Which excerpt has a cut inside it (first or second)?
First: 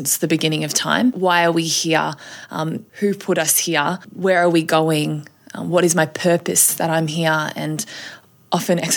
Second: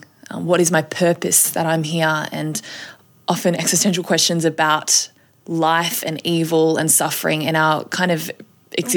first